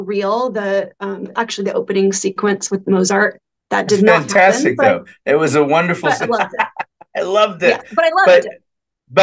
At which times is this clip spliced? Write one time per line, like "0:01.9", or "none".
none